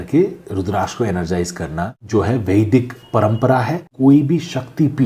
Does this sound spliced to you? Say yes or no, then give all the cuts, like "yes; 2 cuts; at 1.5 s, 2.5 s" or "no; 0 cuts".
yes; 2 cuts; at 2.0 s, 3.9 s